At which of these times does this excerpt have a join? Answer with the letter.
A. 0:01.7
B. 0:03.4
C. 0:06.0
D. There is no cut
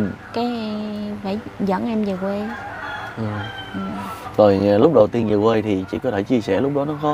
D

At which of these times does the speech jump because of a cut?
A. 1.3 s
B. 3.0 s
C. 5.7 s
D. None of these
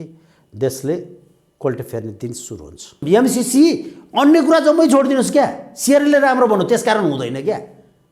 B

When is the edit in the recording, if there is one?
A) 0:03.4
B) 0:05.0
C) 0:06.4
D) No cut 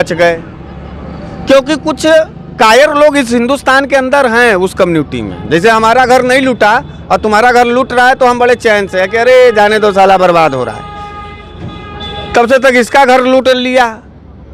D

